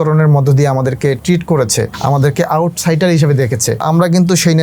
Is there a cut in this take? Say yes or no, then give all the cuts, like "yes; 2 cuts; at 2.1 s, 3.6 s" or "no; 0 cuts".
yes; 2 cuts; at 1.9 s, 3.8 s